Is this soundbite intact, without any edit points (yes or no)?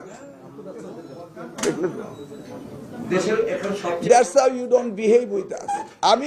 yes